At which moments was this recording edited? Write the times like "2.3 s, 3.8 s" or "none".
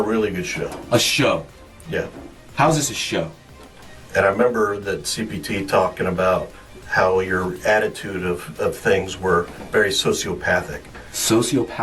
none